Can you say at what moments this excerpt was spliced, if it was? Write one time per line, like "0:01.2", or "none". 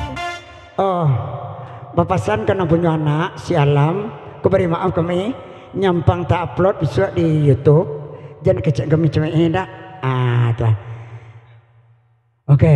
none